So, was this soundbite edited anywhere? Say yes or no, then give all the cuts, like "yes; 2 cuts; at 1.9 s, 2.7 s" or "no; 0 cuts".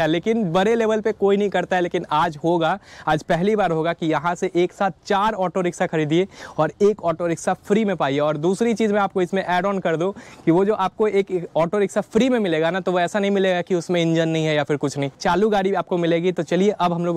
no; 0 cuts